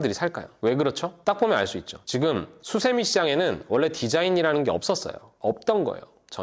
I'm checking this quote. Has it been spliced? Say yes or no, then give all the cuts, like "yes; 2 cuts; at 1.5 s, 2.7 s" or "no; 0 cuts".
no; 0 cuts